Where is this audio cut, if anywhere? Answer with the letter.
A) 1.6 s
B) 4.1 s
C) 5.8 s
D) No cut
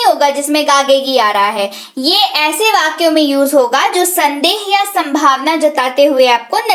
D